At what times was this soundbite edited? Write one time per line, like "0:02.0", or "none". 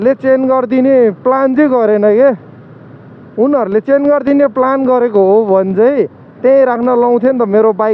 none